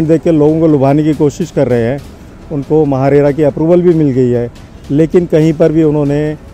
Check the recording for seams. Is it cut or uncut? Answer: uncut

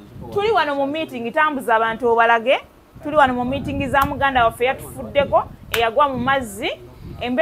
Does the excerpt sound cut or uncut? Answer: uncut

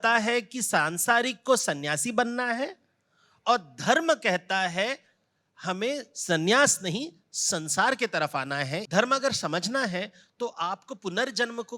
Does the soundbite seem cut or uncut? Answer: cut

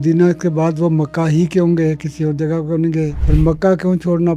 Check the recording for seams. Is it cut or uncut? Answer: cut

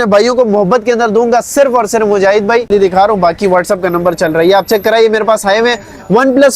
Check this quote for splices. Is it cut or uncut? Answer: cut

